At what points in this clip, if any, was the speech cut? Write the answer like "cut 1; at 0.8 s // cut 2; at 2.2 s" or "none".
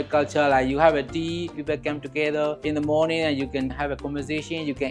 cut 1; at 1.6 s // cut 2; at 2.6 s // cut 3; at 3.7 s